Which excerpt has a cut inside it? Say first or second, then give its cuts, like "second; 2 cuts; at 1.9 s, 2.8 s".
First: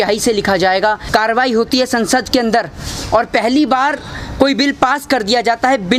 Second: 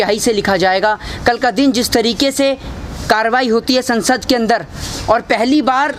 first; 1 cut; at 1.0 s